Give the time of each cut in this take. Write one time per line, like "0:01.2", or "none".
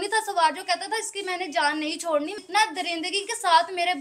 0:02.4